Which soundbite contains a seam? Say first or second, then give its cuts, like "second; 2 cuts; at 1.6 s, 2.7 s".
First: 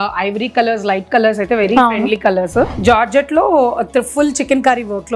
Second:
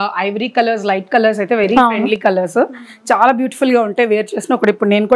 first; 1 cut; at 2.7 s